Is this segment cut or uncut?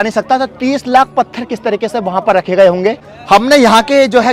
uncut